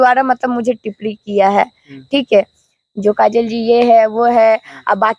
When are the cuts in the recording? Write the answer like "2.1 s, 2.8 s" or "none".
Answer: none